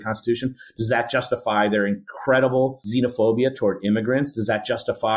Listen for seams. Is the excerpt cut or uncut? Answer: cut